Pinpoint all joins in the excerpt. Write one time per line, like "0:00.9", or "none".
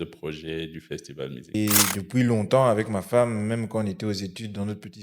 0:01.5